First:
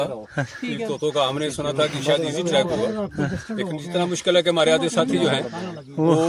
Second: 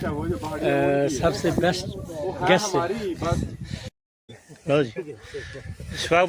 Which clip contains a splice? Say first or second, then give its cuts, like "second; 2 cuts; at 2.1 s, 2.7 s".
second; 1 cut; at 4.0 s